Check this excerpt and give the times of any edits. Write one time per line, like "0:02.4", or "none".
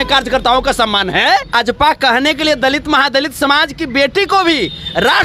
0:01.5